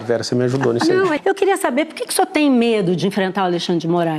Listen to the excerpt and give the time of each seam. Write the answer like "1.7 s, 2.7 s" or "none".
1.2 s